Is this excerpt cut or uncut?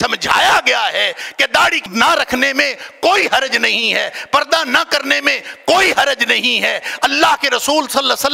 cut